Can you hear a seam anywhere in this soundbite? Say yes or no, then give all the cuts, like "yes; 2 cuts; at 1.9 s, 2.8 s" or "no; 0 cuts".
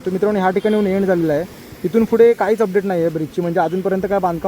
no; 0 cuts